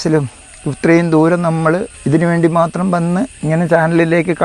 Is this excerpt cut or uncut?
cut